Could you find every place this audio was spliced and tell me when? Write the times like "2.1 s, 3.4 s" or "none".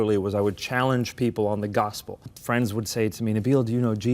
2.3 s